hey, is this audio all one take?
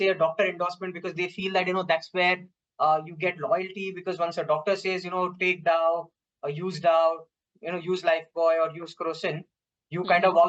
yes; 0 cuts

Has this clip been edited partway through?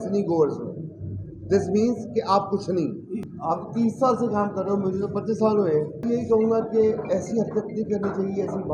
yes; 2 cuts; at 3.2 s, 6.0 s

